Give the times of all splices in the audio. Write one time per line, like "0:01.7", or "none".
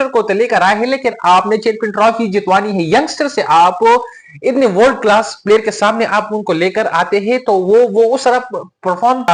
none